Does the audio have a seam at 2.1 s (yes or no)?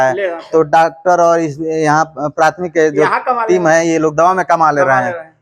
no